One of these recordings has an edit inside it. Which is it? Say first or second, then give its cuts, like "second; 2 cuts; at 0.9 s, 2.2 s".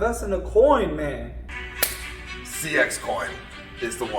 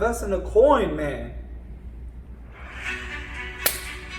first; 1 cut; at 1.5 s